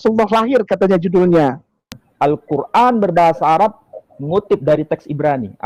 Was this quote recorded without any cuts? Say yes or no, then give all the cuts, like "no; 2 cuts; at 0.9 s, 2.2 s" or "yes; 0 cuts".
no; 1 cut; at 2.0 s